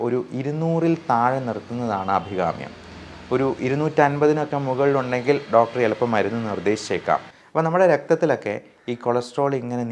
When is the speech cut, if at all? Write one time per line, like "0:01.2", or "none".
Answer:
0:07.4